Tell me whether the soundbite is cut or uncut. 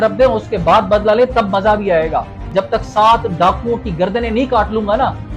cut